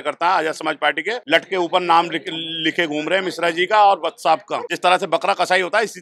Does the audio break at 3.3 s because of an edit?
no; 2 cuts; at 1.2 s, 4.7 s

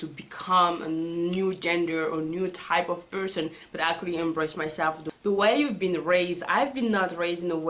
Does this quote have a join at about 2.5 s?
no; 1 cut; at 5.1 s

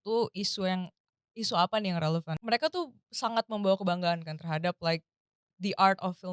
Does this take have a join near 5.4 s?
no; 1 cut; at 2.3 s

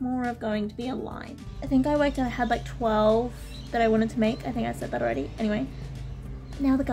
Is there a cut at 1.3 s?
yes; 1 cut; at 1.3 s

